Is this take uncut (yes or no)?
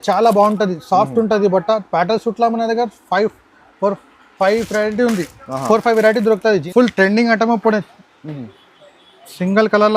no